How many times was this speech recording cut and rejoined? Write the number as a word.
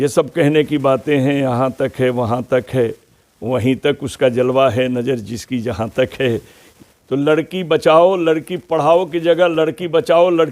one